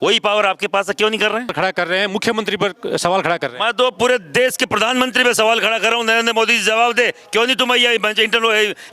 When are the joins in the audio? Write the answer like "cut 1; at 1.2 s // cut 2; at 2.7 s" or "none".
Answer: cut 1; at 1.5 s